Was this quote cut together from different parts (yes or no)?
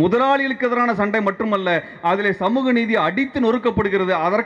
no